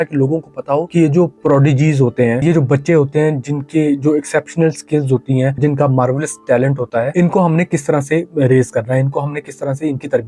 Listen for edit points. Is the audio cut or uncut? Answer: cut